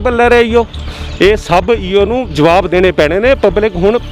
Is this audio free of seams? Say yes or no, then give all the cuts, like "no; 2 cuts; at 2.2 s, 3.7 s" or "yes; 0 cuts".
yes; 0 cuts